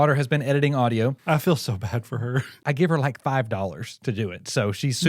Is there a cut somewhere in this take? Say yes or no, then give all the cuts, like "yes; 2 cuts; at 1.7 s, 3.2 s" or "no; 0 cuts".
yes; 2 cuts; at 1.2 s, 2.6 s